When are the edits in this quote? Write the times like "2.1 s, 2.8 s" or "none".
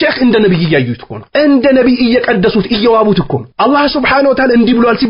none